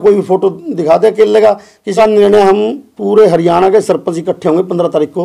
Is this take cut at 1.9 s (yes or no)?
yes